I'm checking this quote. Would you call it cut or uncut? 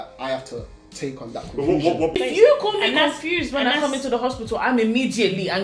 cut